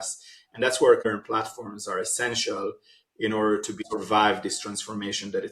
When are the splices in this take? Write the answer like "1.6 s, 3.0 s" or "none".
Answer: 1.0 s, 3.8 s